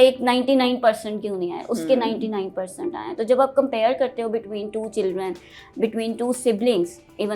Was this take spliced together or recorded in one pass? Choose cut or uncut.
uncut